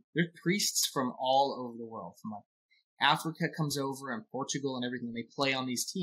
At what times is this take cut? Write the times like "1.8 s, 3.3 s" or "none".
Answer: none